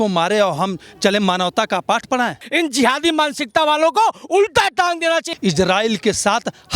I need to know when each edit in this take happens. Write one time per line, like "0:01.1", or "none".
0:02.4
0:05.3